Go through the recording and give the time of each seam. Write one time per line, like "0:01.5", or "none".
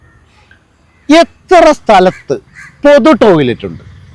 none